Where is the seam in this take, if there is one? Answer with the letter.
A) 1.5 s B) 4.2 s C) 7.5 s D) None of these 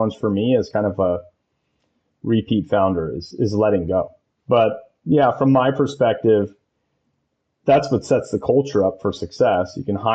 B